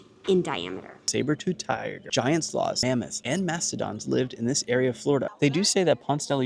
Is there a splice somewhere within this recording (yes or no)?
yes